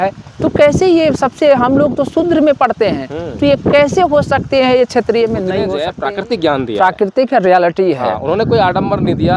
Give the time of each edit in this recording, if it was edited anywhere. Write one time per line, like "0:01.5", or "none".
0:05.8